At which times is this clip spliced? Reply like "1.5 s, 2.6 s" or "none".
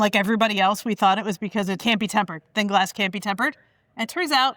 1.8 s